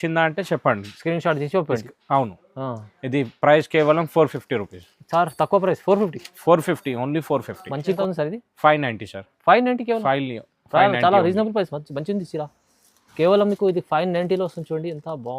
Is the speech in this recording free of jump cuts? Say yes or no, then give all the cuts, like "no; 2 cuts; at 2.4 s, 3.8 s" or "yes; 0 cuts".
no; 1 cut; at 8.0 s